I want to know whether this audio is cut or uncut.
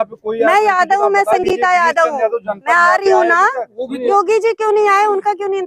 cut